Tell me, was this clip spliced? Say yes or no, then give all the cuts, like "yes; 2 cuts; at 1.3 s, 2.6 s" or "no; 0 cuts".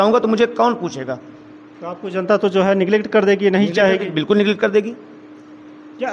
no; 0 cuts